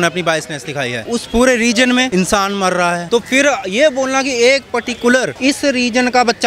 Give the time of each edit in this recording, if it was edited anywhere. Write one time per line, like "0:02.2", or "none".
0:01.1
0:03.0